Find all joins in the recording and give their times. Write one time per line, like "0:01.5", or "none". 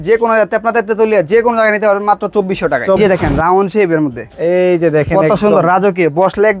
0:03.0